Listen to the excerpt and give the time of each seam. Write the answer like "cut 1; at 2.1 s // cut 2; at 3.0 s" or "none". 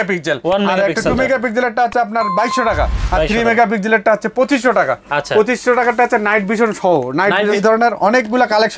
cut 1; at 7.6 s